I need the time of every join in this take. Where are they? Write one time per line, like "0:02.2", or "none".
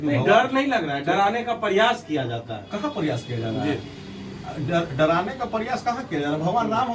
none